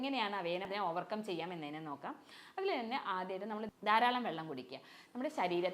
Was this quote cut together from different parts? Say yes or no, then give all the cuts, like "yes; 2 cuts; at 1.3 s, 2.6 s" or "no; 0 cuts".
no; 0 cuts